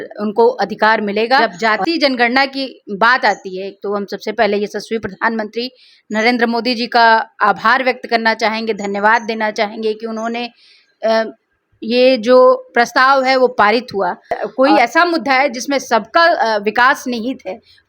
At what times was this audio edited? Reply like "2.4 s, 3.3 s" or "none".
1.4 s, 14.4 s